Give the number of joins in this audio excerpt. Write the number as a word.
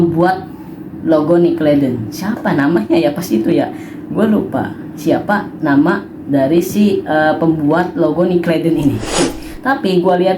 one